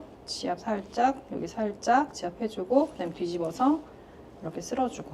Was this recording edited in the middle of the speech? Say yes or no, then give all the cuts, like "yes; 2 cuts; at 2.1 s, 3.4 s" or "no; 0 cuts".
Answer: no; 0 cuts